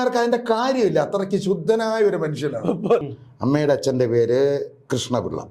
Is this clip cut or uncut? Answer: cut